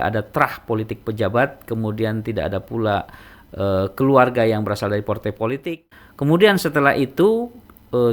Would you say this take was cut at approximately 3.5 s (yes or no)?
no